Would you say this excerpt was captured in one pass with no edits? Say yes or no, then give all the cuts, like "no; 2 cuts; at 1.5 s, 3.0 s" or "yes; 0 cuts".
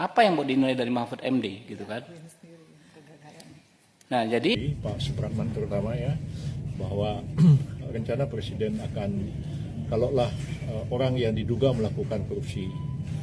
no; 1 cut; at 4.6 s